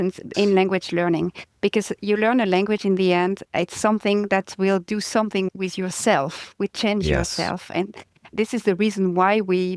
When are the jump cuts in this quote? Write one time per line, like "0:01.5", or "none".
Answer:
none